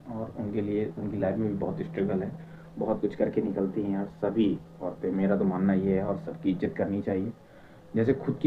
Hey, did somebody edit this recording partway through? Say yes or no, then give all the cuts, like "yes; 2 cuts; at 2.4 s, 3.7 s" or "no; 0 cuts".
no; 0 cuts